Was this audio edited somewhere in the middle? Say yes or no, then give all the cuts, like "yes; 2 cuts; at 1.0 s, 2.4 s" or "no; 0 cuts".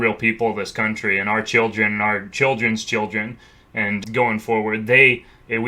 yes; 1 cut; at 4.0 s